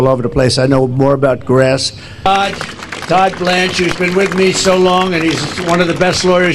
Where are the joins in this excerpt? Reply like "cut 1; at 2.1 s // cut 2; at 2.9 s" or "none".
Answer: cut 1; at 2.2 s